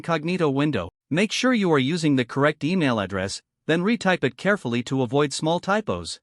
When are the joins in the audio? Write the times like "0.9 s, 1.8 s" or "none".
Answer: 1.0 s